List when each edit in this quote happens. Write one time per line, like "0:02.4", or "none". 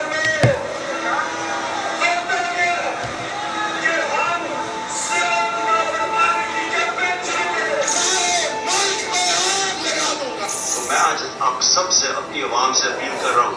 none

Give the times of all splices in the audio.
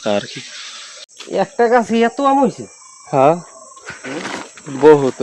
0:01.4

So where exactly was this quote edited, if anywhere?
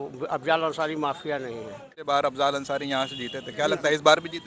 0:02.0

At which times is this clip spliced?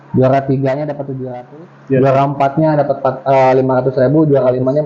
0:01.1

